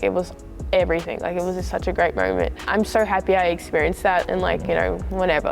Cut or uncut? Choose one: uncut